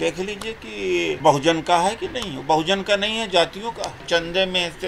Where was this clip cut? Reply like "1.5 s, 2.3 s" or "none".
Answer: 1.2 s, 4.0 s